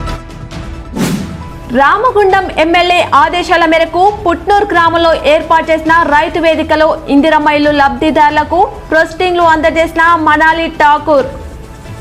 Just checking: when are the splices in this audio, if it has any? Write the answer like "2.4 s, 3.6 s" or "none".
1.1 s